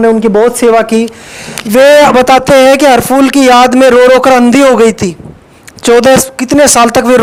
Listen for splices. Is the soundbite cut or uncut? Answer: uncut